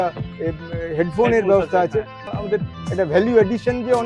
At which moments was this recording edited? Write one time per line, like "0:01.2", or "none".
0:02.2